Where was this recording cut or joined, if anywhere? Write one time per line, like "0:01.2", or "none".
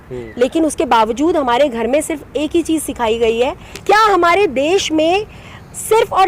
0:03.7